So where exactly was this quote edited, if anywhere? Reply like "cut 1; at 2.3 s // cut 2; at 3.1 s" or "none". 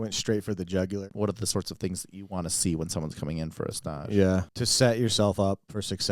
cut 1; at 1.0 s // cut 2; at 4.5 s